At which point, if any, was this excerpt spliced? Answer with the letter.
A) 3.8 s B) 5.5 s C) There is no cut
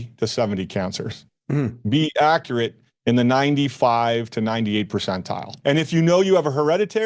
B